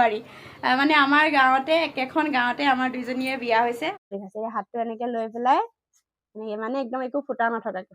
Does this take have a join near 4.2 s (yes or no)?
yes